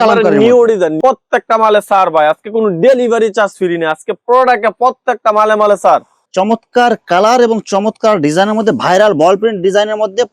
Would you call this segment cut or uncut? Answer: cut